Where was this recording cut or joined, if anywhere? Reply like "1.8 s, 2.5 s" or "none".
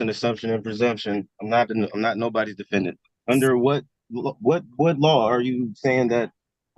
3.1 s